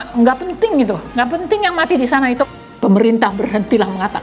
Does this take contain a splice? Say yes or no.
yes